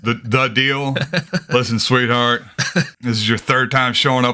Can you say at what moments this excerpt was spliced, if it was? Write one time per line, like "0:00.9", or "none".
0:01.3
0:02.9